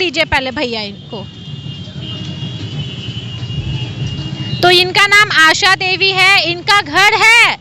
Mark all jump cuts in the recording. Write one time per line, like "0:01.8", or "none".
none